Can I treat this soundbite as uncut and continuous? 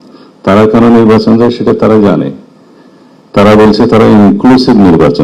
yes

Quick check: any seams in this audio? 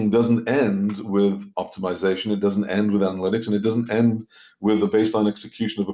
no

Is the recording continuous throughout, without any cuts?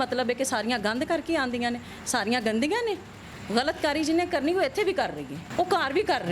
no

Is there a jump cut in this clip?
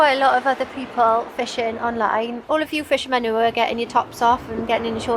yes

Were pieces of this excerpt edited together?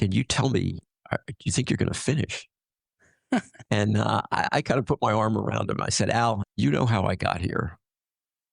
yes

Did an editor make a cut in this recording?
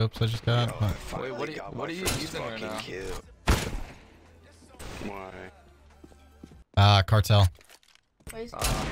yes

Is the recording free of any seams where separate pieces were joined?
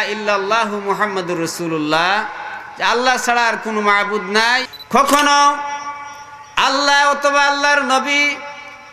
no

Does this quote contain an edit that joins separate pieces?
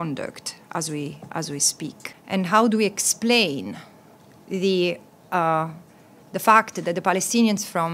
yes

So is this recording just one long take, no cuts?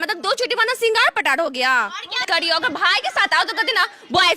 no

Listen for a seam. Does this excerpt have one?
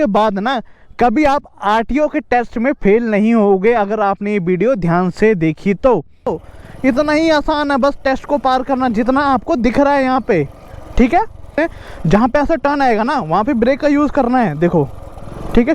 yes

